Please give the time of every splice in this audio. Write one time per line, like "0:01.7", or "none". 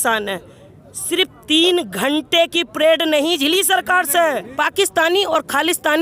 0:04.5